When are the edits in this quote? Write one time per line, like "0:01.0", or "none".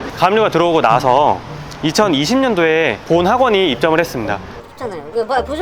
0:04.5